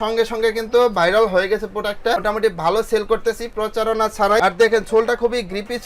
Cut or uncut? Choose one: cut